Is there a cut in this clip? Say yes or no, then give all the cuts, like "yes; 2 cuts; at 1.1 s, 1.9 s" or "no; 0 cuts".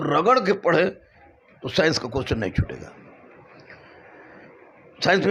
no; 0 cuts